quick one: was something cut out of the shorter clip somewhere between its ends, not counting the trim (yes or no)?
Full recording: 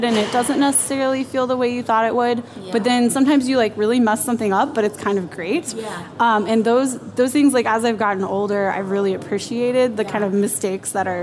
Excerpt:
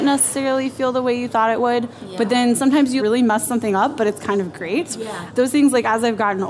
yes